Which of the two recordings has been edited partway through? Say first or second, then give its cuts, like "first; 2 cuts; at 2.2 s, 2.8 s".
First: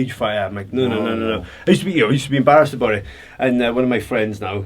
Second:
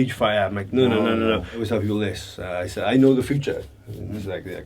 second; 1 cut; at 1.5 s